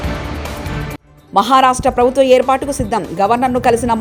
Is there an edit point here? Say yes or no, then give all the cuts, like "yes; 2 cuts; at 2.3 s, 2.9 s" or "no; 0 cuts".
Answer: no; 0 cuts